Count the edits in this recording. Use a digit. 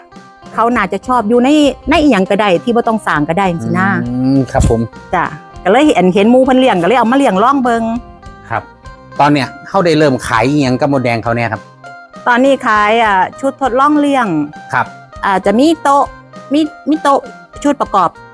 1